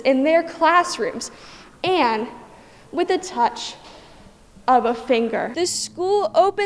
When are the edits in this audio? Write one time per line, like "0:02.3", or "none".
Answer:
0:05.5